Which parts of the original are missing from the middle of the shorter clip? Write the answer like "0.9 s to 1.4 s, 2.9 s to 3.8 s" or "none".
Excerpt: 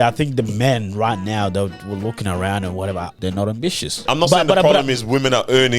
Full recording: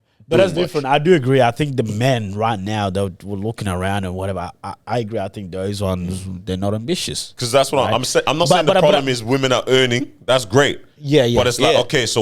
4.5 s to 6.4 s, 7.3 s to 8.2 s